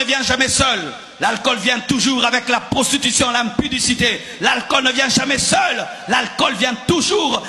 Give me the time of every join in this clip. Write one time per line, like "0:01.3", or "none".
none